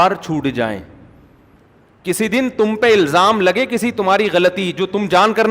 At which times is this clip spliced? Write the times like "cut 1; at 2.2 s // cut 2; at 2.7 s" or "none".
cut 1; at 1.6 s